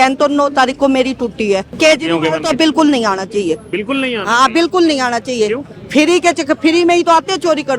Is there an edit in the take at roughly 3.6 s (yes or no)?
no